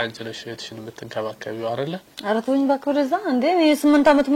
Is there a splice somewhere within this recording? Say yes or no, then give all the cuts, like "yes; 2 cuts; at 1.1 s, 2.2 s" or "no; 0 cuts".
yes; 1 cut; at 2.1 s